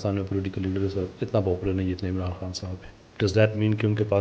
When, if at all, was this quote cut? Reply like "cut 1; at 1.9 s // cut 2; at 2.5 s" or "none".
cut 1; at 1.2 s